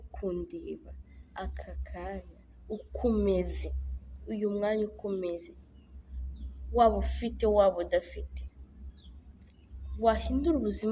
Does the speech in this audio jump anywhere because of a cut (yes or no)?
no